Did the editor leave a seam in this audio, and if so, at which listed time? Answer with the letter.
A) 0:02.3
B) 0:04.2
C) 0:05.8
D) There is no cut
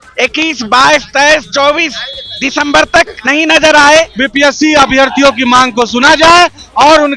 B